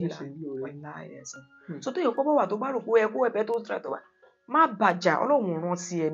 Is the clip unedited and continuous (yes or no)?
yes